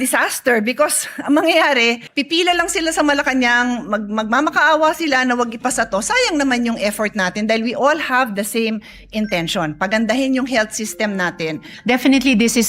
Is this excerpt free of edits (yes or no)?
no